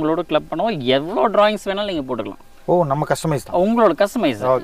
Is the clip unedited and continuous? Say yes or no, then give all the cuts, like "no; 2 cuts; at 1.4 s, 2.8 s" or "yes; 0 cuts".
yes; 0 cuts